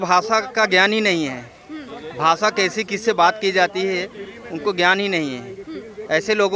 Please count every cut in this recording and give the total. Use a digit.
0